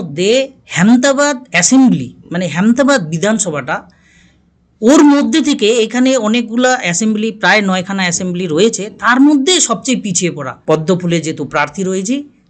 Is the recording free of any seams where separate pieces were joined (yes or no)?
no